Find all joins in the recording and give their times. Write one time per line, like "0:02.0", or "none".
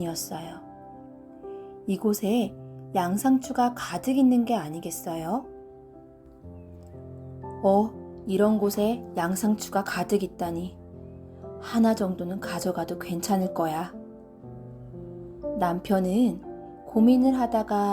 0:05.5
0:06.9